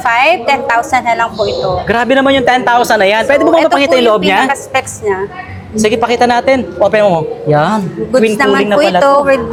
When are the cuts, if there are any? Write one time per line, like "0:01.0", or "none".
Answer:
none